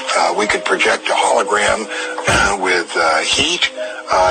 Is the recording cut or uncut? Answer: uncut